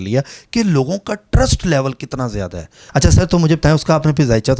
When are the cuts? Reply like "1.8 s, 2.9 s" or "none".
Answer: 2.8 s